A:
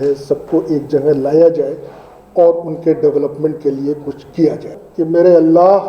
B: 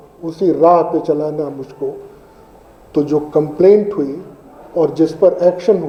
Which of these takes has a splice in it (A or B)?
A